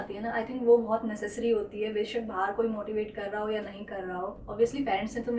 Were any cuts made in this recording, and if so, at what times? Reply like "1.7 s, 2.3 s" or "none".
none

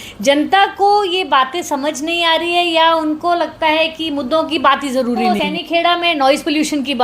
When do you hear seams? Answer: 5.4 s

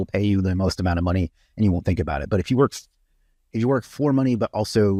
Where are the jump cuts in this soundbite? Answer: none

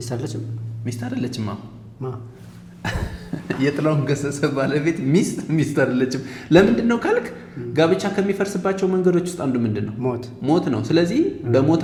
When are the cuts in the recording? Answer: none

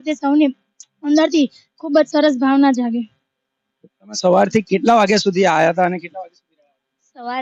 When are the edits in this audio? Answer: none

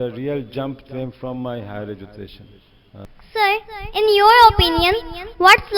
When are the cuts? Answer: 3.0 s

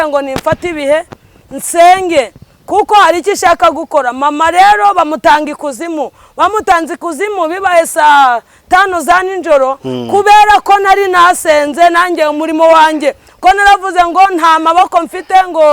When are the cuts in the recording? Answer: none

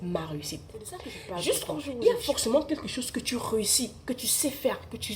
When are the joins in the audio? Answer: 1.8 s

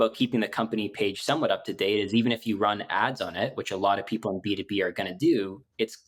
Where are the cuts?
none

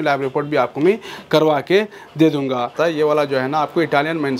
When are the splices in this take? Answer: 2.7 s

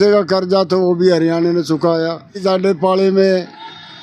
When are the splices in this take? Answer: 2.4 s

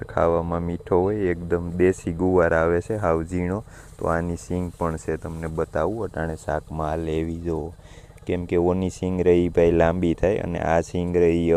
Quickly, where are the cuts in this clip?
none

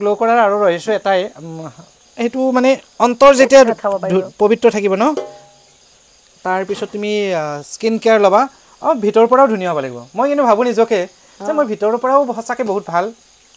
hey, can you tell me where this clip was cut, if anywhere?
none

